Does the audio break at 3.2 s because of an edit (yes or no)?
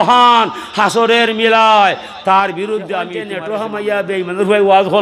yes